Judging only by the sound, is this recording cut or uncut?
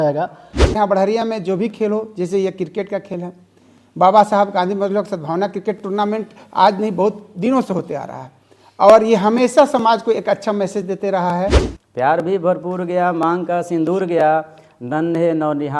cut